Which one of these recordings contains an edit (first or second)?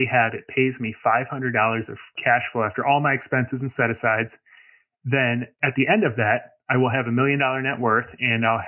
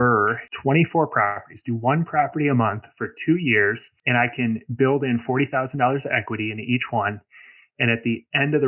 first